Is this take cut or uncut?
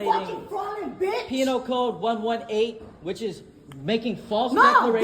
cut